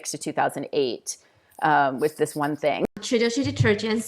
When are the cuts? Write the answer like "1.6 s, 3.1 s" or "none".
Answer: 2.9 s